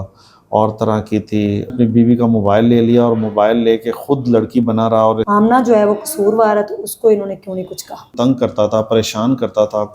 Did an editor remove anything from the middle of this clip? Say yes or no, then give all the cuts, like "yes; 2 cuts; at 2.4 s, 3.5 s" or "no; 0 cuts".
yes; 3 cuts; at 1.7 s, 5.2 s, 8.1 s